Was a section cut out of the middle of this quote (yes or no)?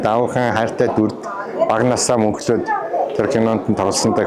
no